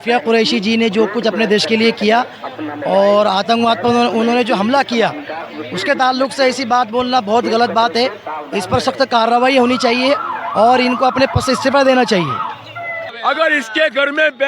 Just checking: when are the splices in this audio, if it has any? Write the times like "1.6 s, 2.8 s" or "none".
13.0 s

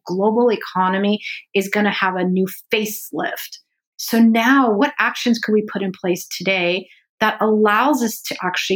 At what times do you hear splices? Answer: 3.9 s, 4.8 s

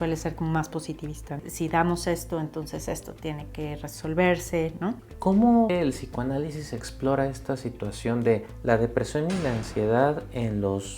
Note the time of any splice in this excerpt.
1.3 s, 5.0 s, 5.7 s

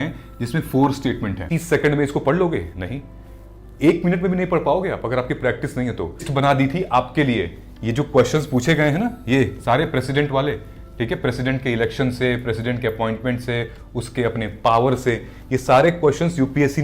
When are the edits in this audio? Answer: 1.4 s, 6.3 s

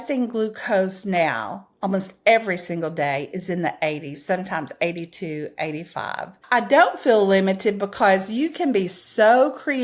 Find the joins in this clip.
6.3 s

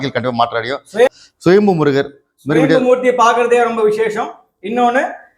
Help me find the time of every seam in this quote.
1.1 s

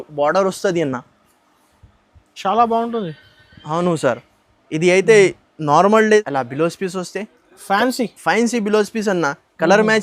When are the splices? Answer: 6.2 s

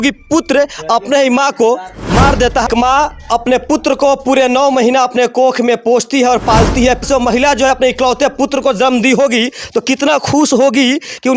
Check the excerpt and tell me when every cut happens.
2.7 s, 7.0 s

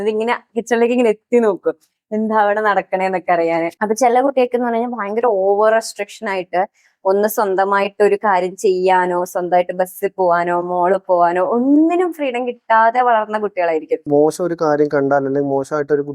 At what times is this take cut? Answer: 3.7 s, 14.0 s

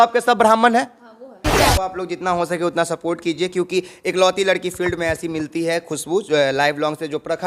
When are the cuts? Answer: 1.5 s

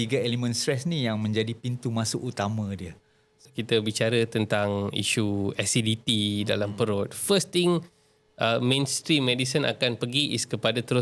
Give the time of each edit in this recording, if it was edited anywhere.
3.4 s

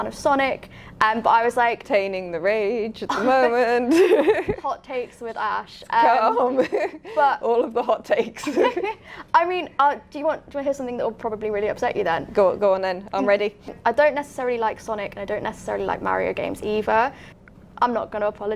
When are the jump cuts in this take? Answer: 1.8 s, 13.7 s, 17.3 s

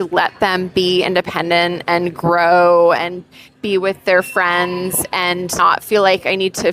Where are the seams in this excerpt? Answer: 5.6 s

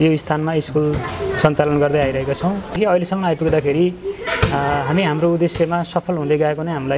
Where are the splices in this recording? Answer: 2.8 s

